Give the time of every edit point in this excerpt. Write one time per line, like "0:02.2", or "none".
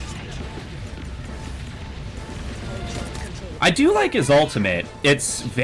0:03.5